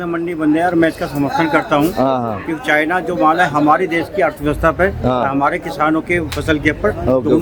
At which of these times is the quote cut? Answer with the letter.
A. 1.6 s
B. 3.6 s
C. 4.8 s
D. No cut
D